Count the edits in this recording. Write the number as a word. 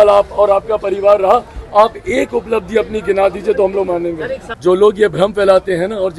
one